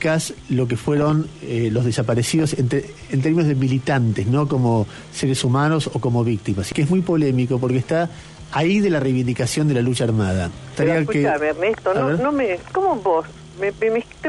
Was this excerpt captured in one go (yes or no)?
no